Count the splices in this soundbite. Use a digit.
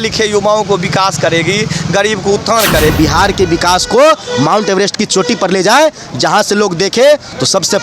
1